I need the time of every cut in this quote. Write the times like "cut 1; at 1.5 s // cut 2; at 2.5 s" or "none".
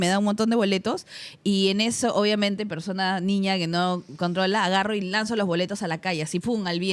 none